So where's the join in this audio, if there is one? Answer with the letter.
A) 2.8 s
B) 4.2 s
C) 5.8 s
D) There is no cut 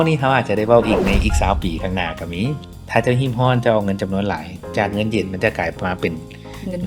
A